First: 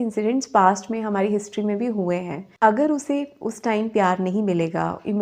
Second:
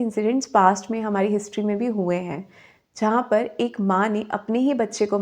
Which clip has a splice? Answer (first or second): first